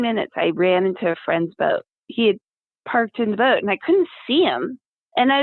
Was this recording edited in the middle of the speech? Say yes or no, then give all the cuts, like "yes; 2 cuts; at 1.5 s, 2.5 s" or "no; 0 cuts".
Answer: no; 0 cuts